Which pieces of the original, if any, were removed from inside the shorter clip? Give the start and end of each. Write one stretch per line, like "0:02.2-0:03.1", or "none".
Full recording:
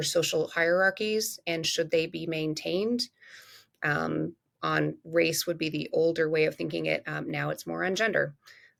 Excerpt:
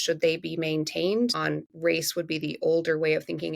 0:03.1-0:04.7